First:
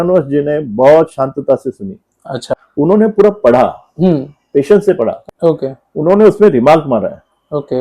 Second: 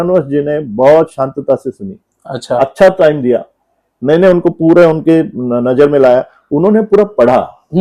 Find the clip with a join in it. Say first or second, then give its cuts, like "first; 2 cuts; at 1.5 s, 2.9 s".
first; 2 cuts; at 2.5 s, 5.2 s